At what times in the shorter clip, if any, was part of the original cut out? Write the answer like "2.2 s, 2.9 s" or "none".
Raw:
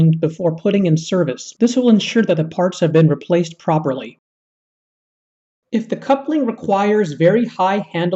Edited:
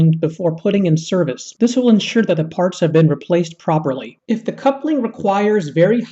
4.1 s

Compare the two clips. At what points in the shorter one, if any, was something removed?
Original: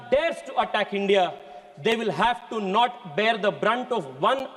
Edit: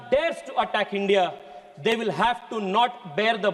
none

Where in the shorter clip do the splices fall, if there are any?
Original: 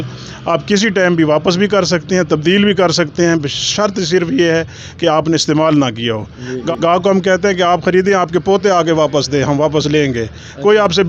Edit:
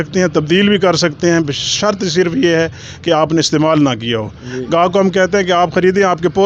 4.6 s

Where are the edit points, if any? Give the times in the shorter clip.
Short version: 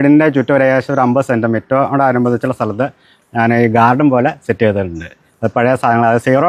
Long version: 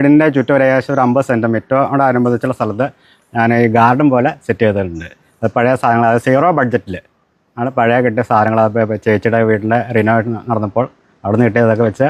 none

